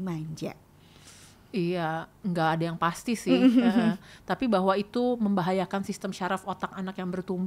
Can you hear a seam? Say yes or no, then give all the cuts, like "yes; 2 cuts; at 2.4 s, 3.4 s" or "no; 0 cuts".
no; 0 cuts